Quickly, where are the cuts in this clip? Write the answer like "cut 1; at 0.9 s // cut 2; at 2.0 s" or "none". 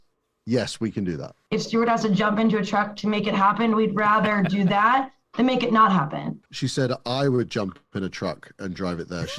cut 1; at 1.3 s // cut 2; at 6.4 s